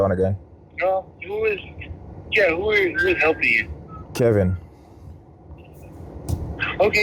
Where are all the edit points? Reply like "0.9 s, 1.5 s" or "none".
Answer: none